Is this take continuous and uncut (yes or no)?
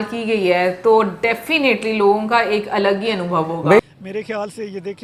no